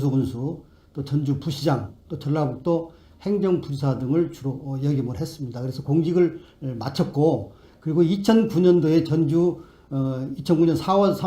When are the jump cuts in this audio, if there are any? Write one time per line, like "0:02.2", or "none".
0:06.0

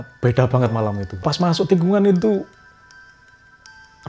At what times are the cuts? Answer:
0:01.2

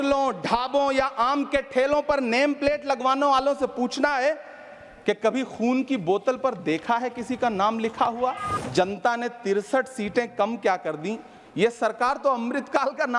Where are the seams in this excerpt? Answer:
0:08.5

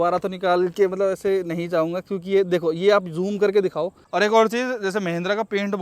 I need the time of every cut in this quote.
0:04.0

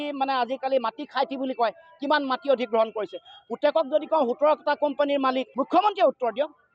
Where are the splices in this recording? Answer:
0:05.5

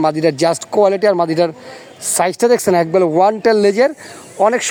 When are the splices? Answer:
none

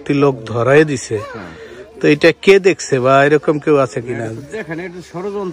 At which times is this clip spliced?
none

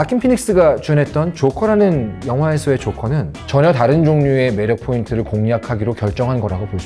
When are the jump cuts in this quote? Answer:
0:03.3

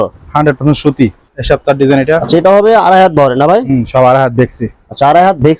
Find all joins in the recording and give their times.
0:01.3

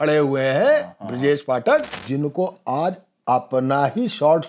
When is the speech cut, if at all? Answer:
0:01.9

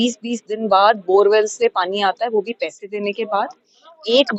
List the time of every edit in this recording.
none

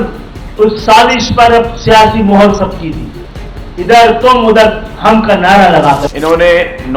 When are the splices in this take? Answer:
0:06.1

